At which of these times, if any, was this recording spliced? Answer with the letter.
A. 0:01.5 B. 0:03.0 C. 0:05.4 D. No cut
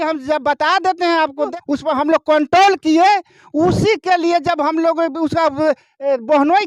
A